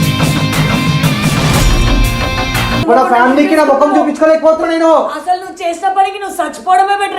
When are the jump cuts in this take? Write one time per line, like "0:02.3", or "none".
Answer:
0:02.8

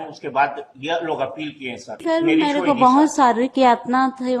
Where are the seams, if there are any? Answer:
0:02.0

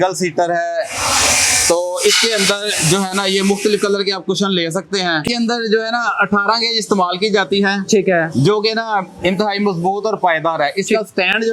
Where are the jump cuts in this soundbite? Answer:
0:05.3

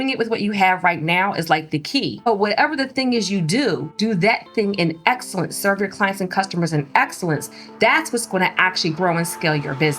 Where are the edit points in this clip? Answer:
0:02.3
0:03.9

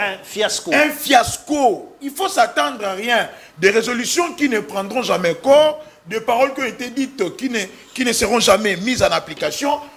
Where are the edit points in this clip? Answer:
none

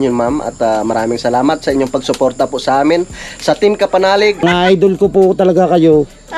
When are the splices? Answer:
0:04.4

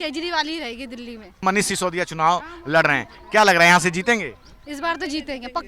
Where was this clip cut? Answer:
0:01.4

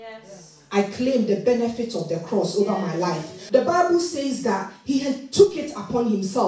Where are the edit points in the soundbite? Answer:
0:03.4

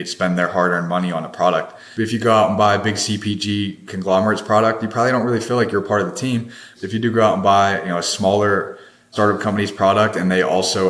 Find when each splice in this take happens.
0:01.8
0:06.7
0:09.1

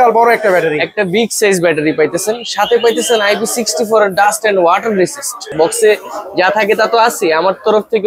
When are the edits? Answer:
0:05.5

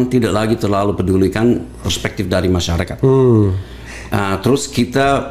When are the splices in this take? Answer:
none

